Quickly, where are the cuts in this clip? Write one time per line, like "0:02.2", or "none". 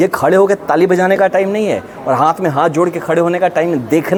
none